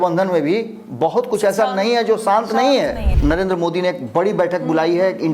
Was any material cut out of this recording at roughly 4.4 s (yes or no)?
no